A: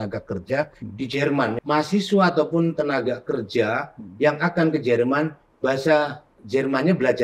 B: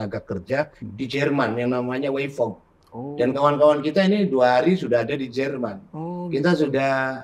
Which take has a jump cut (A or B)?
A